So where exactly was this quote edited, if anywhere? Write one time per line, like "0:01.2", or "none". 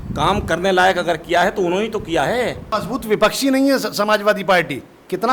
0:02.7